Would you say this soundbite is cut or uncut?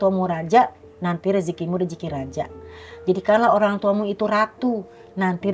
uncut